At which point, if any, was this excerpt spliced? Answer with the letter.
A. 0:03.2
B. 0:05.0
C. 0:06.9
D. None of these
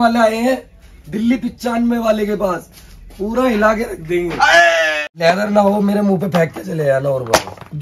B